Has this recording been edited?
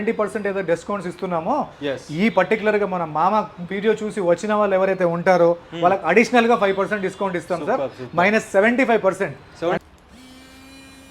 yes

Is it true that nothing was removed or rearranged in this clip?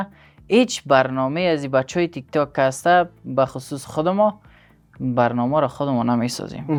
yes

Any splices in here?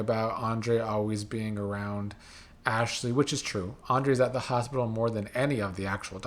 no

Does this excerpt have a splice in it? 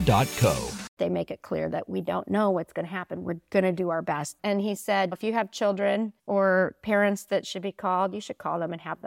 yes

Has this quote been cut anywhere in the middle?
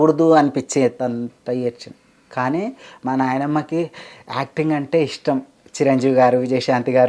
no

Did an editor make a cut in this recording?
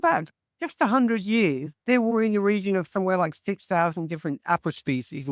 yes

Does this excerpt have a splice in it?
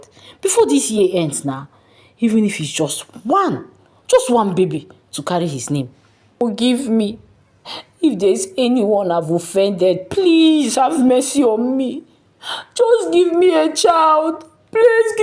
yes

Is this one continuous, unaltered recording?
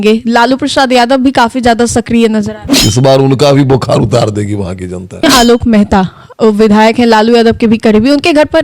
no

